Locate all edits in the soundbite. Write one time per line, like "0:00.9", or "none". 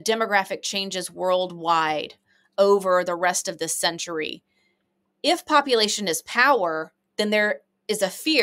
none